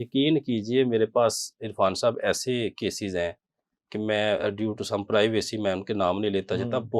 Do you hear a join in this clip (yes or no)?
no